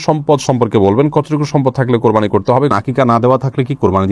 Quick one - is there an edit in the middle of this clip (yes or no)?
yes